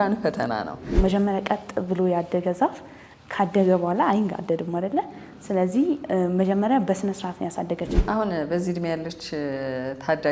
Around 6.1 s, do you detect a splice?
no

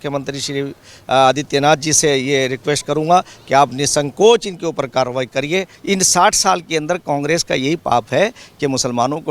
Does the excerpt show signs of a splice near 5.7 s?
yes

